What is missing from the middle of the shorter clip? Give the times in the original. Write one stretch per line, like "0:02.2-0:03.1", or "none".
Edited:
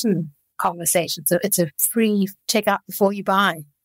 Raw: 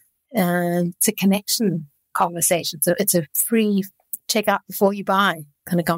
0:03.9-0:04.2